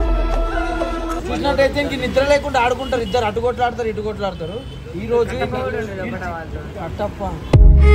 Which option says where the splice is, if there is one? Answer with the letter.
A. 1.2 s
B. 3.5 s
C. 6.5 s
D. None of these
A